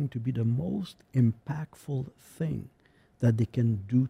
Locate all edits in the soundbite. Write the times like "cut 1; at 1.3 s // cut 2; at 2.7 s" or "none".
none